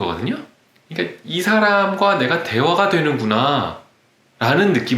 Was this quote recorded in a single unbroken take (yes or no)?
yes